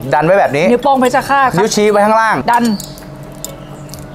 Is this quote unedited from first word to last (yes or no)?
no